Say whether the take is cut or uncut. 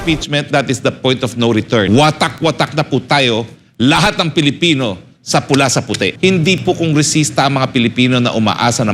cut